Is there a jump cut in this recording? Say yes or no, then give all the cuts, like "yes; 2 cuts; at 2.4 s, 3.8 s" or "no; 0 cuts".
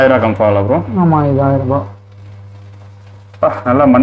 no; 0 cuts